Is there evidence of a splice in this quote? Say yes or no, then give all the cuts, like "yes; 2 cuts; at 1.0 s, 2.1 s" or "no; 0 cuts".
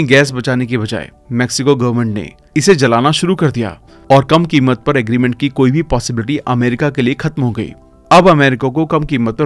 no; 0 cuts